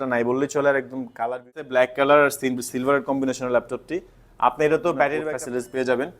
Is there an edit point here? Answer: yes; 2 cuts; at 1.6 s, 5.2 s

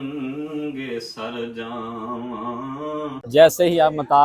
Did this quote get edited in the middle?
yes; 1 cut; at 3.2 s

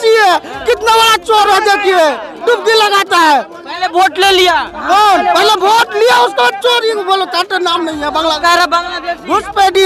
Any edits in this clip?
no; 0 cuts

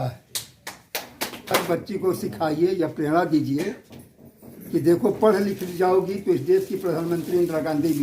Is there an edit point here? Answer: yes; 1 cut; at 1.5 s

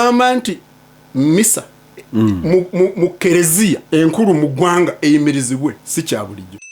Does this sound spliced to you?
yes; 2 cuts; at 3.8 s, 5.8 s

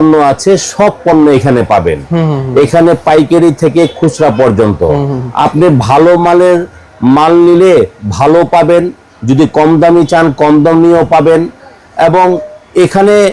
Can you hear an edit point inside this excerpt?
no; 0 cuts

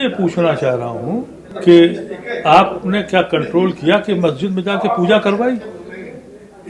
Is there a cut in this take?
yes; 1 cut; at 1.4 s

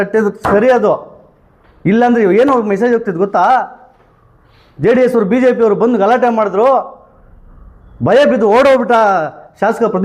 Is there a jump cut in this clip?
no; 0 cuts

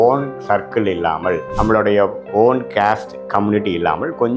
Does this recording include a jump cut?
no; 0 cuts

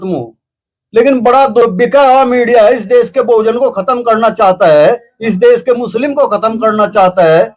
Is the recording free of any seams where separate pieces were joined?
no; 1 cut; at 1.6 s

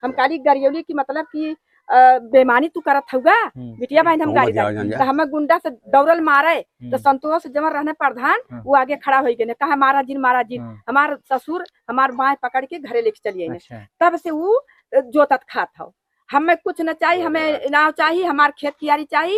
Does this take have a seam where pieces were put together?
no; 0 cuts

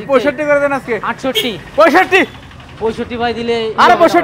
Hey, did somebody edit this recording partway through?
no; 0 cuts

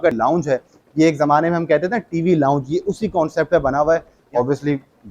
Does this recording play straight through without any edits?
no; 1 cut; at 4.2 s

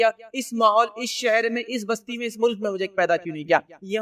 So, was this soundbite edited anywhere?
no; 0 cuts

